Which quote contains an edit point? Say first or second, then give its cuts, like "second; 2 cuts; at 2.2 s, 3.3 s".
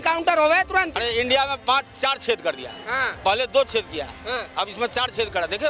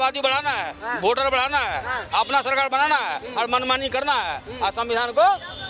first; 1 cut; at 0.9 s